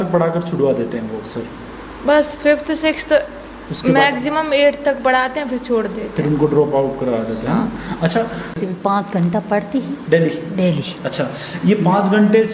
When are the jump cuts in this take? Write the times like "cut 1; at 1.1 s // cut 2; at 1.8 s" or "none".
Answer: cut 1; at 8.5 s